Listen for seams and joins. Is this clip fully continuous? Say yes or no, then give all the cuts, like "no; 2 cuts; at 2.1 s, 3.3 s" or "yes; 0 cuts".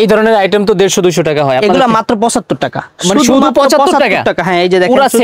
yes; 0 cuts